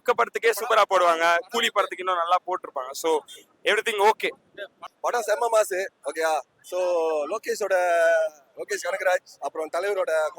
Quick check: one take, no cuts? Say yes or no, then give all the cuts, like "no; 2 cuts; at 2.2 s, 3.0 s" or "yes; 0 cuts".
no; 1 cut; at 4.9 s